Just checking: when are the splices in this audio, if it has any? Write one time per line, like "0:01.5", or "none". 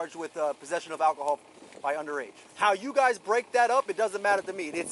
0:02.5